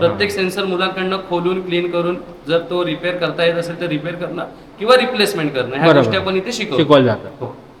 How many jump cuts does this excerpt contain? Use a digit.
0